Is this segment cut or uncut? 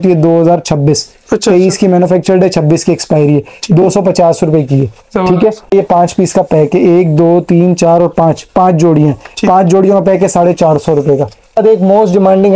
cut